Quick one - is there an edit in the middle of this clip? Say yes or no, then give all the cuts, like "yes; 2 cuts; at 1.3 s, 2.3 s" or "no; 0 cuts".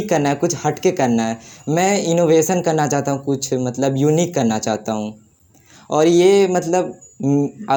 no; 0 cuts